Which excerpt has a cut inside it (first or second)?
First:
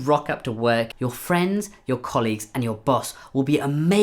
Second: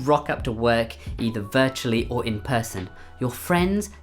first